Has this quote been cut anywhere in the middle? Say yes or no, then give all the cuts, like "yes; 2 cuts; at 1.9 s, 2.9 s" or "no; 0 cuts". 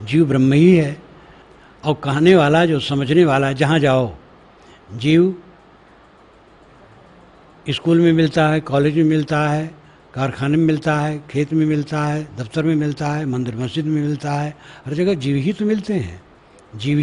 no; 0 cuts